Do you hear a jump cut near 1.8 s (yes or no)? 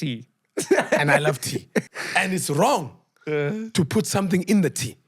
yes